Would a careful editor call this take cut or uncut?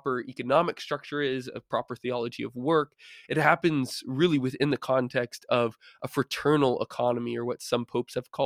uncut